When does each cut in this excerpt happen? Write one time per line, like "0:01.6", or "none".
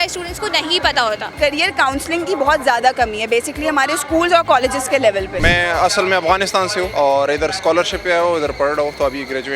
0:01.4
0:05.4
0:06.9